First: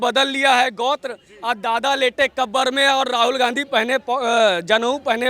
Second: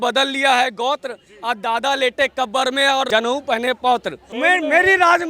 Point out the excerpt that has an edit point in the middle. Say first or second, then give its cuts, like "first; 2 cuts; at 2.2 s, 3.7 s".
second; 2 cuts; at 3.1 s, 4.2 s